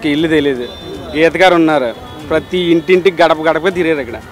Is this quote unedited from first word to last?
yes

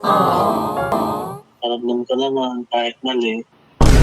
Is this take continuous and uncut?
no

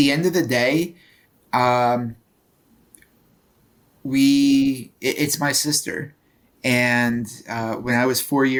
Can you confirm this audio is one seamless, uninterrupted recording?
yes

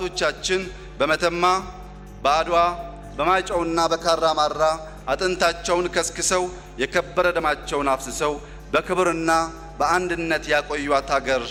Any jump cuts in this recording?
no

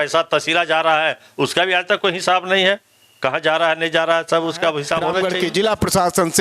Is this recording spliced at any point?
yes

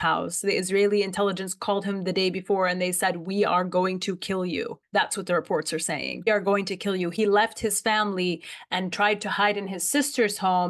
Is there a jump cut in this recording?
no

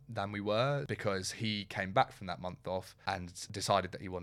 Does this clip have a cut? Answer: yes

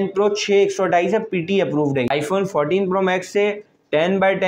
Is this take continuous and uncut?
no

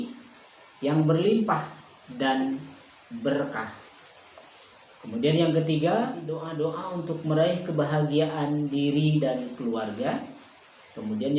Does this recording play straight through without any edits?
no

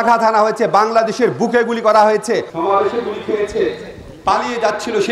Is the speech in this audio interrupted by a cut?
yes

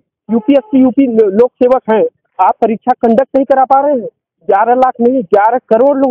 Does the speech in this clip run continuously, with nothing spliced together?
yes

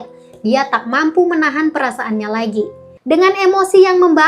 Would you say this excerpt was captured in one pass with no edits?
no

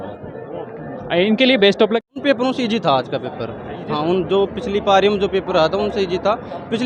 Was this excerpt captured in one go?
no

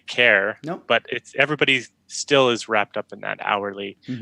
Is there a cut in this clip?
no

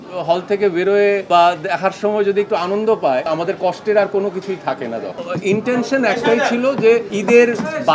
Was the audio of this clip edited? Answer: yes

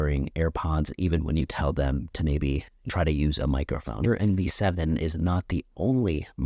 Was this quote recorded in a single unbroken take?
no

